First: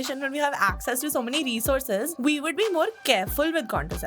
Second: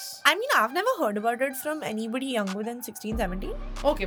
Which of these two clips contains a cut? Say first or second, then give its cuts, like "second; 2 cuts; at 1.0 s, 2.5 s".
first; 2 cuts; at 2.1 s, 3.0 s